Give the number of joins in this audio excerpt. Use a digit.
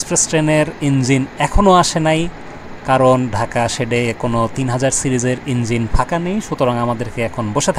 0